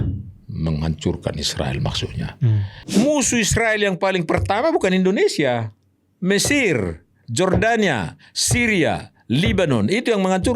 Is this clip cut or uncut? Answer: cut